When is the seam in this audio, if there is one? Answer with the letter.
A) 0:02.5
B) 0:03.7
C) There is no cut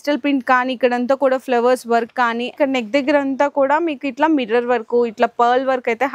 A